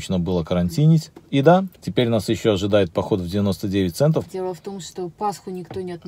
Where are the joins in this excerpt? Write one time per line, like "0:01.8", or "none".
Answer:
0:01.2
0:01.8
0:04.3